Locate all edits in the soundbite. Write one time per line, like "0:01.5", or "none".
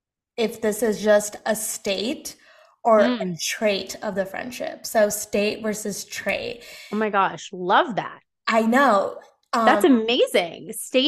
none